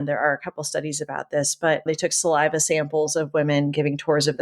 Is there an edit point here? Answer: yes; 1 cut; at 1.8 s

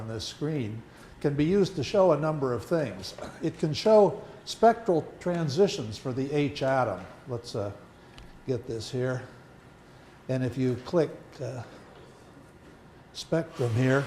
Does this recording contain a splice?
yes; 1 cut; at 2.1 s

